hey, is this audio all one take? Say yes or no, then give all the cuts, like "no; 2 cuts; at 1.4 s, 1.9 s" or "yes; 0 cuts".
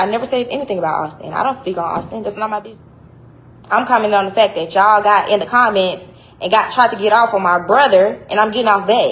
no; 1 cut; at 2.8 s